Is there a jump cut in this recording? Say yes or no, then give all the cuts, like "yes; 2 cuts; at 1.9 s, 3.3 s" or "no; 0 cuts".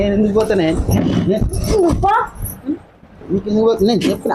no; 0 cuts